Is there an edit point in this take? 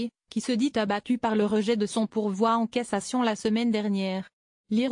yes; 1 cut; at 4.0 s

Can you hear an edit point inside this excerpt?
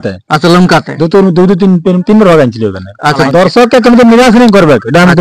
yes; 1 cut; at 3.2 s

